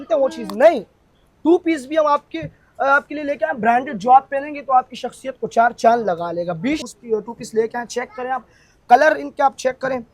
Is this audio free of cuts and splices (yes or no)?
no